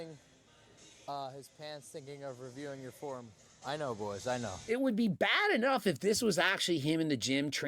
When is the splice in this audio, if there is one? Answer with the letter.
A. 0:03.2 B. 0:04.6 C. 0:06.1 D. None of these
B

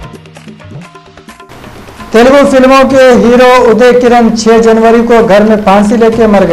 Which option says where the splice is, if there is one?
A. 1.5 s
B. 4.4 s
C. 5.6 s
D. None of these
A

